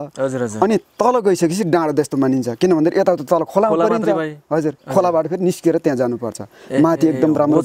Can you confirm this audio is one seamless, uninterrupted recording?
yes; 0 cuts

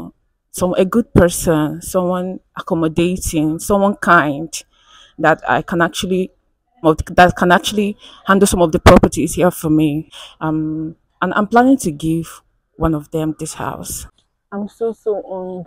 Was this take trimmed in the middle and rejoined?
yes; 3 cuts; at 6.8 s, 10.2 s, 14.2 s

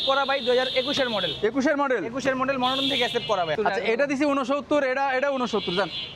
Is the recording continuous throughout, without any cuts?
no; 1 cut; at 3.6 s

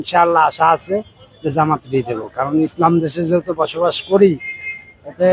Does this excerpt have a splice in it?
no; 0 cuts

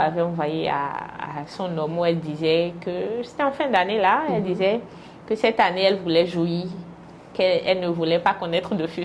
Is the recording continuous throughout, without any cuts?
yes; 0 cuts

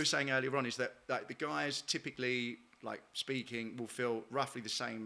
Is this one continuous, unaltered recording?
yes; 0 cuts

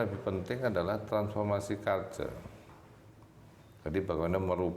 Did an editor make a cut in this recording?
no; 0 cuts

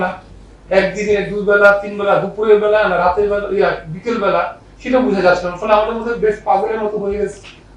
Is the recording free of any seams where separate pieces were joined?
yes; 0 cuts

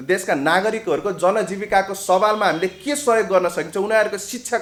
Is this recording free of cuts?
yes; 0 cuts

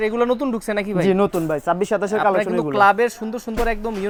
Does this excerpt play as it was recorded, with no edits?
yes; 0 cuts

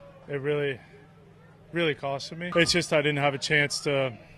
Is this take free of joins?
no; 1 cut; at 2.4 s

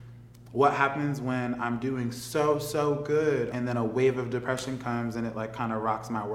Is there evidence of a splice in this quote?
yes; 1 cut; at 3.5 s

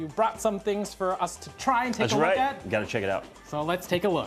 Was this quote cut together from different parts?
no; 0 cuts

